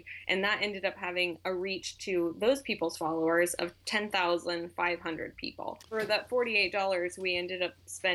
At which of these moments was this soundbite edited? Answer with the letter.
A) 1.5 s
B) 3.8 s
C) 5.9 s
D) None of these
C